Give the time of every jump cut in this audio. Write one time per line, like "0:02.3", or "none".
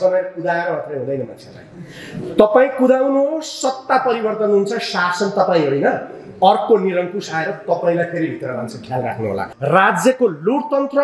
0:09.5